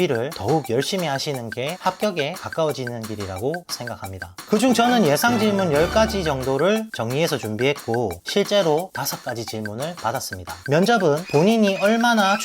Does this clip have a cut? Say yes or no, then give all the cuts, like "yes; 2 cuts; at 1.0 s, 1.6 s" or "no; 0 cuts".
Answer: yes; 3 cuts; at 3.9 s, 8.2 s, 10.6 s